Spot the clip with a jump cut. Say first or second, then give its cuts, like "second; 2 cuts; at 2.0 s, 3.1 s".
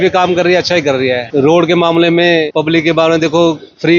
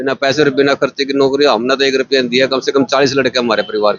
first; 2 cuts; at 1.2 s, 2.5 s